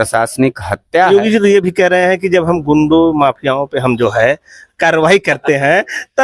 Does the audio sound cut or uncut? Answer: cut